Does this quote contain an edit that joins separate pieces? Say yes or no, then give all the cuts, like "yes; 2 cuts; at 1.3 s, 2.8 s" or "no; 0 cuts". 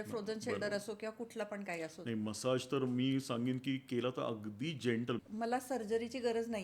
yes; 1 cut; at 5.2 s